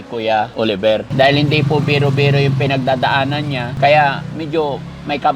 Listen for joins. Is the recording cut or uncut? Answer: cut